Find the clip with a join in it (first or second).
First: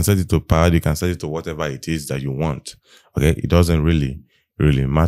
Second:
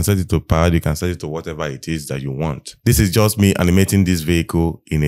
second